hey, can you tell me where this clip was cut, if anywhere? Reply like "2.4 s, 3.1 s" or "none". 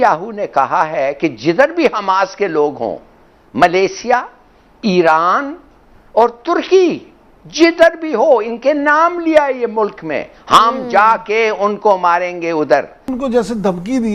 13.1 s